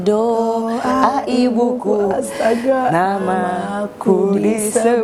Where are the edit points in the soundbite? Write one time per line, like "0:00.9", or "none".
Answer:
none